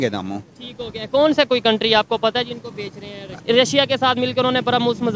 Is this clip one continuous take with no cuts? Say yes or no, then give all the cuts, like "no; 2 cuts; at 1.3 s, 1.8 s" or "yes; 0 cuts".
no; 1 cut; at 3.3 s